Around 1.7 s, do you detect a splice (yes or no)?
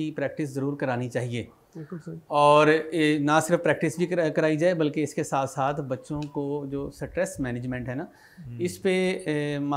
no